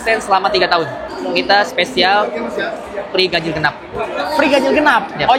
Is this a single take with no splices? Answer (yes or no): no